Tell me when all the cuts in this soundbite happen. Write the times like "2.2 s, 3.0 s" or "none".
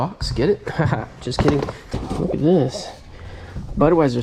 1.9 s

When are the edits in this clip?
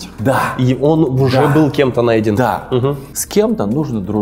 3.1 s

